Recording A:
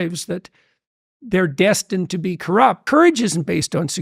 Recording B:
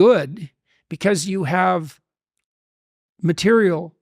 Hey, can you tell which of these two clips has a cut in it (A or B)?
A